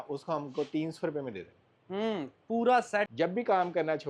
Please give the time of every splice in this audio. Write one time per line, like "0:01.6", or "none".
0:03.1